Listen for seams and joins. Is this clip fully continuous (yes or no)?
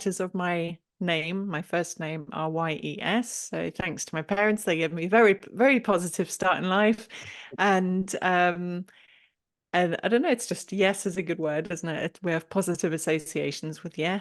yes